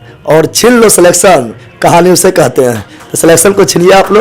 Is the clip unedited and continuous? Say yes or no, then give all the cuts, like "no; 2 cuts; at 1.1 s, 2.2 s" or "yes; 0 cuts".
yes; 0 cuts